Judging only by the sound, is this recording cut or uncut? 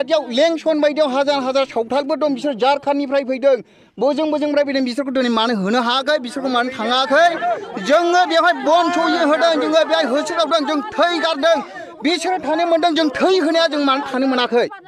uncut